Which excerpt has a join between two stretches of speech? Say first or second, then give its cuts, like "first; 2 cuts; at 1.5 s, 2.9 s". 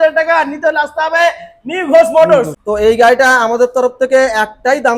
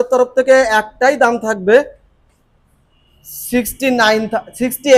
first; 1 cut; at 2.5 s